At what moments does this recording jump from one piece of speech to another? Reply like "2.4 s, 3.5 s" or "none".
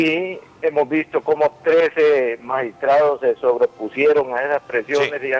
3.4 s